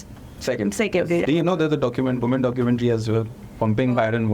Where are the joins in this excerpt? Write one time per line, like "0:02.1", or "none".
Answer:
0:01.2